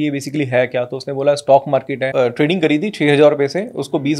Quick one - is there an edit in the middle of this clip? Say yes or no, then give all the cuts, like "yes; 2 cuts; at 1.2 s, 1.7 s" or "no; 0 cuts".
yes; 1 cut; at 2.1 s